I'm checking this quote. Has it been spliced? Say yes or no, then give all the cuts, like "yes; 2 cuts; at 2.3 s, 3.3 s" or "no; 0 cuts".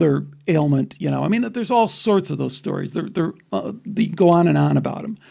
no; 0 cuts